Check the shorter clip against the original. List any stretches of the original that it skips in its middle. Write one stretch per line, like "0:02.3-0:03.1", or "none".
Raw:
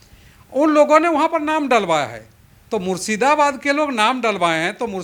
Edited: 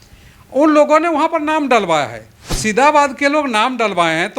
0:02.6-0:03.0